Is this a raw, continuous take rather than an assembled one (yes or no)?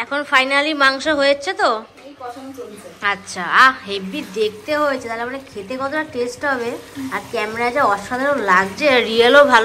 yes